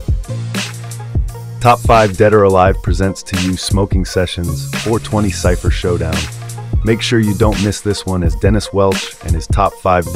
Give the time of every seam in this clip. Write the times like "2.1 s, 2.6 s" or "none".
1.5 s